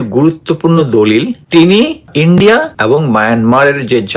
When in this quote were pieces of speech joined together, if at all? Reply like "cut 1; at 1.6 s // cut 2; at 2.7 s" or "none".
cut 1; at 1.4 s // cut 2; at 2.0 s // cut 3; at 2.7 s